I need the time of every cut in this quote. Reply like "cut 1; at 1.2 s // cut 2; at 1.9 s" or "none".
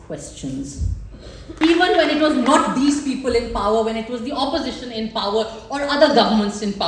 cut 1; at 1.5 s